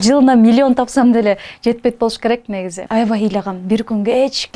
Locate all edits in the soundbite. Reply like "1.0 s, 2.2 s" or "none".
2.8 s